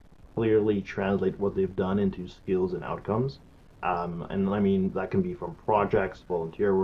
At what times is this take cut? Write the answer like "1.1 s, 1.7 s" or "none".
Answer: none